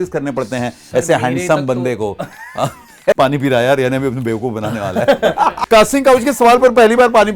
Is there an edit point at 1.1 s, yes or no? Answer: no